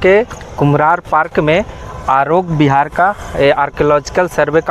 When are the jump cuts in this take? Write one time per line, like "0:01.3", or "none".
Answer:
none